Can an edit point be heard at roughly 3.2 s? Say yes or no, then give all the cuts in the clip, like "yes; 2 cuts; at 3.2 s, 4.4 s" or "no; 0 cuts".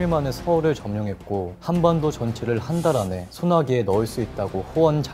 yes; 2 cuts; at 1.5 s, 3.2 s